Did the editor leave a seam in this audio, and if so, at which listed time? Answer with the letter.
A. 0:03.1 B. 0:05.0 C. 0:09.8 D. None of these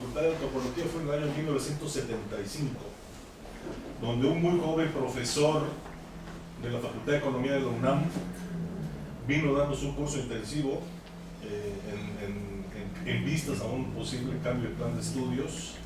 A